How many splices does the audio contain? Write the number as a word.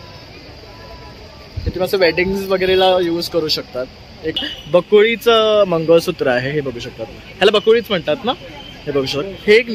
one